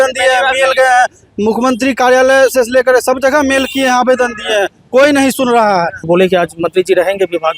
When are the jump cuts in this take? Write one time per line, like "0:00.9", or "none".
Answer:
0:06.0